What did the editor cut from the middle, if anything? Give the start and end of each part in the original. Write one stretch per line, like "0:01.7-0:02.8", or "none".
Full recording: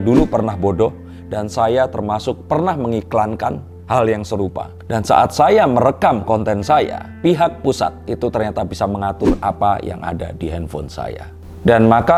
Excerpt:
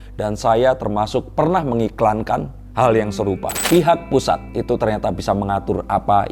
0:04.6-0:07.0